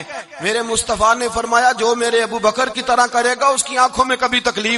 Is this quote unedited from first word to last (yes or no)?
yes